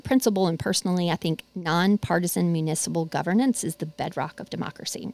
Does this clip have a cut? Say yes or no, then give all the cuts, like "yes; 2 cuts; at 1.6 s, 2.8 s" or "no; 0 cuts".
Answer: no; 0 cuts